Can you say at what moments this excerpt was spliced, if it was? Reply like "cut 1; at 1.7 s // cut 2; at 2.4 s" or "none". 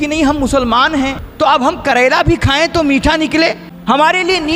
cut 1; at 1.2 s // cut 2; at 3.7 s